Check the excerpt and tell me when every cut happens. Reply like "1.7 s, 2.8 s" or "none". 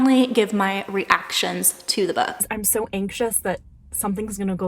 2.6 s